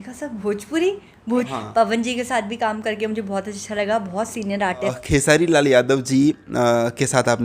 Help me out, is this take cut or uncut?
cut